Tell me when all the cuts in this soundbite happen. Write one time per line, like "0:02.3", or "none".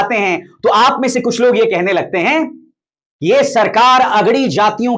none